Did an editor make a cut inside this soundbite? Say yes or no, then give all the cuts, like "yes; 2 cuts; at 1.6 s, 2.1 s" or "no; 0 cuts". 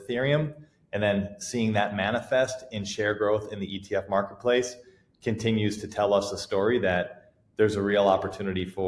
no; 0 cuts